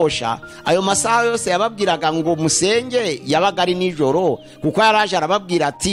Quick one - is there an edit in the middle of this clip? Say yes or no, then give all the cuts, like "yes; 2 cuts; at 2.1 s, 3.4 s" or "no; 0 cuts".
no; 0 cuts